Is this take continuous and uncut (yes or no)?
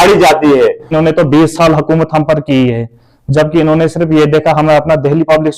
no